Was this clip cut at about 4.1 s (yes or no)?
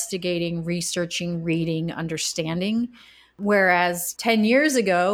yes